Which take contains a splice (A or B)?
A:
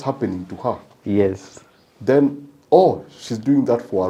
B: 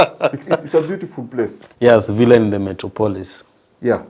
B